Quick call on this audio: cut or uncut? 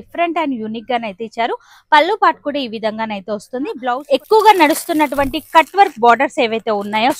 cut